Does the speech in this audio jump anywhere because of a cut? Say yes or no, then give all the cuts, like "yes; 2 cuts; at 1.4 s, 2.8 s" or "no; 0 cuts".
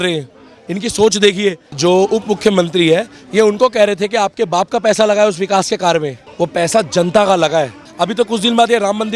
yes; 3 cuts; at 1.7 s, 6.2 s, 7.8 s